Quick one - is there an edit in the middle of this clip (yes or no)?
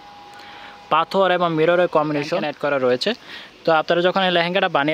yes